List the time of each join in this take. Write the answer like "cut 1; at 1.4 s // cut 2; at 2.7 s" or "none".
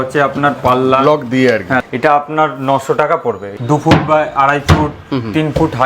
cut 1; at 1.8 s // cut 2; at 3.5 s